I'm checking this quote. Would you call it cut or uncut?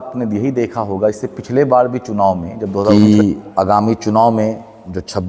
cut